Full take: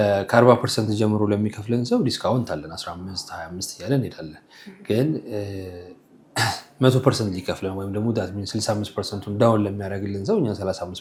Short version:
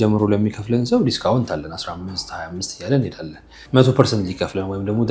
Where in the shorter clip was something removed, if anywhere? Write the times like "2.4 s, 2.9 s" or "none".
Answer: 3.6 s

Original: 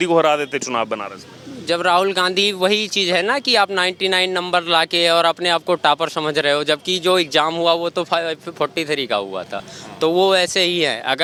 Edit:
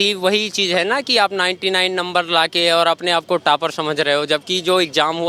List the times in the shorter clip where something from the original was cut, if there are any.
none

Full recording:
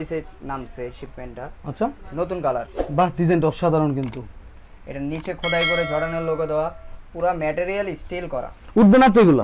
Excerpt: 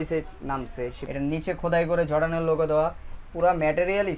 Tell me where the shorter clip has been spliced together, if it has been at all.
1.0 s

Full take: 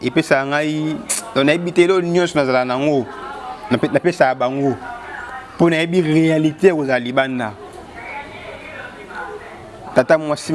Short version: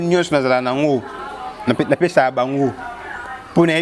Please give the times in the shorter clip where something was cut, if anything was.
none

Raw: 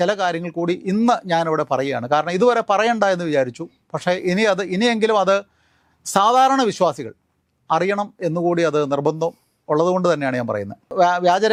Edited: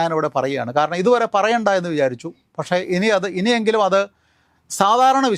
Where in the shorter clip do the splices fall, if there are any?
none

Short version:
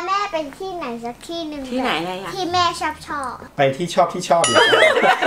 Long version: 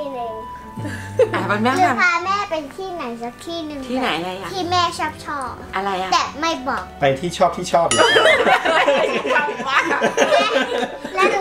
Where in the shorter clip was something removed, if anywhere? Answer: 3.4 s

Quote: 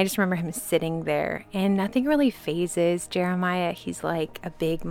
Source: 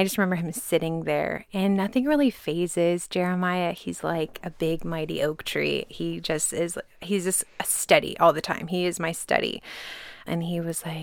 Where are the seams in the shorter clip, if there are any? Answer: none

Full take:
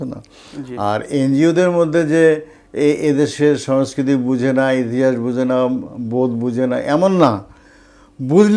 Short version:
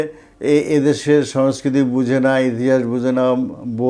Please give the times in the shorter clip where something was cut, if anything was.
none

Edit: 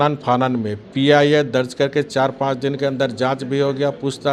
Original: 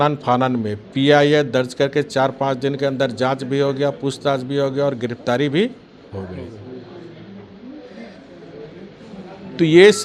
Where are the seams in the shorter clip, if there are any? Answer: none

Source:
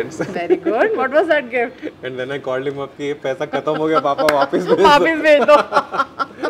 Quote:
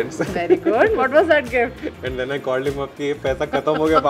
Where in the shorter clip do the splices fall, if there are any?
none

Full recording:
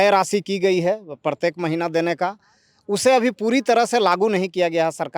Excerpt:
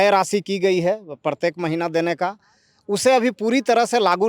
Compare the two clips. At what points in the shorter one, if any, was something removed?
none

